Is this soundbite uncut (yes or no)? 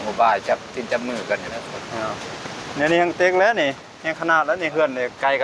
no